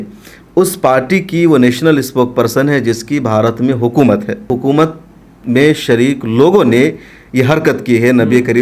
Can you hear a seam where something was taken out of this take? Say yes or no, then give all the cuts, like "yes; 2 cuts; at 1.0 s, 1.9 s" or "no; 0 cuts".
yes; 1 cut; at 4.5 s